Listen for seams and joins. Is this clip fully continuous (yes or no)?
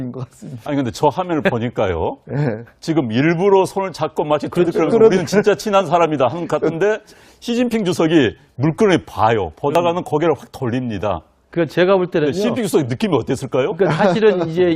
no